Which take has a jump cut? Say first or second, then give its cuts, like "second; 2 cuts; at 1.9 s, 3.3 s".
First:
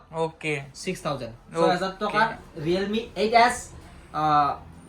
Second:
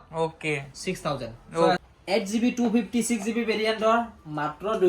second; 1 cut; at 1.8 s